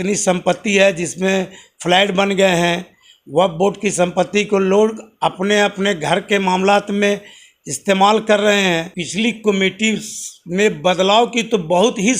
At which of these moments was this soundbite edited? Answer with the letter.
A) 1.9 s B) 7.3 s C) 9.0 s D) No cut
C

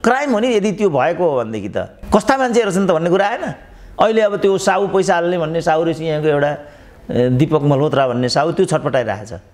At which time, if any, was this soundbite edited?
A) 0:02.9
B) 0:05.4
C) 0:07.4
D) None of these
D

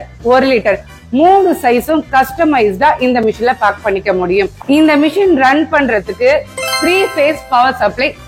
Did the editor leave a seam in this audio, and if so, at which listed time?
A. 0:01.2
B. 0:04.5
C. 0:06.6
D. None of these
B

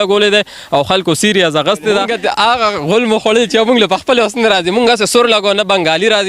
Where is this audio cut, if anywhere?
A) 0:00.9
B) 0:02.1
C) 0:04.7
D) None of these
B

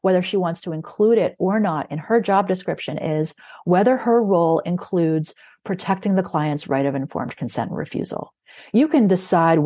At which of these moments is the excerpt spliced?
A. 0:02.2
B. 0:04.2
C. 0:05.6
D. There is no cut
D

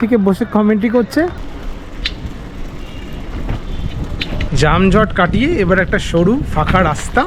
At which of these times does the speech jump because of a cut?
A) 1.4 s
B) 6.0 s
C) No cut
A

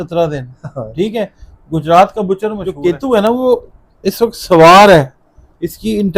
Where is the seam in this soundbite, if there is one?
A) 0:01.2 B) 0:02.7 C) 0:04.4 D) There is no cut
B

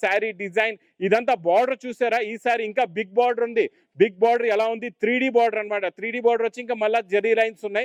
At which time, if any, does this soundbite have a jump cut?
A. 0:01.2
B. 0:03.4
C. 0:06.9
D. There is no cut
D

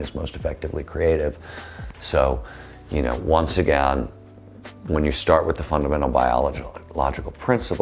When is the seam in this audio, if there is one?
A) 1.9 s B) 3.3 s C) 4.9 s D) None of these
D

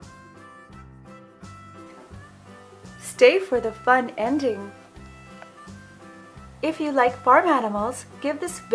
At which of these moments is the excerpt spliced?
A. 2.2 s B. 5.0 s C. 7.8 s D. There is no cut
C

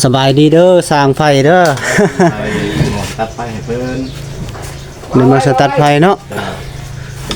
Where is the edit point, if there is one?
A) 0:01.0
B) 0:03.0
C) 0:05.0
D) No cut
B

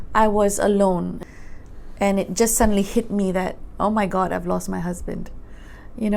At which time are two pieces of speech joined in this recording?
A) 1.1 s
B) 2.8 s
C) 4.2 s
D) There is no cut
A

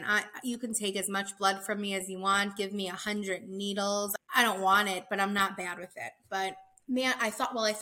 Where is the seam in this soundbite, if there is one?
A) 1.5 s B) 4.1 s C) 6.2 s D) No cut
B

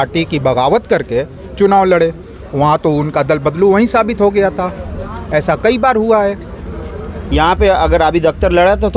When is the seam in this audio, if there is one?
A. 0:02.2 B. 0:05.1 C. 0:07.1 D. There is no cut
C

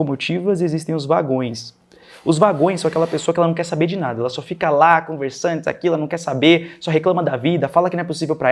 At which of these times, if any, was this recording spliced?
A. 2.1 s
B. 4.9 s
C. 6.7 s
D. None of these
D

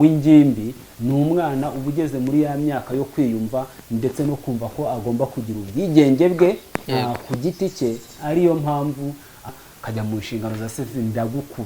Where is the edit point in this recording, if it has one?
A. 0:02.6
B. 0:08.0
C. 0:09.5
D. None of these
C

